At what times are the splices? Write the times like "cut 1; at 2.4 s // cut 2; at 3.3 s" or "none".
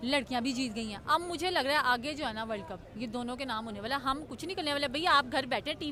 none